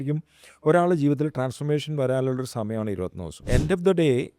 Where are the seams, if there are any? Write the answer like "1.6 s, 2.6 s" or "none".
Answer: 3.5 s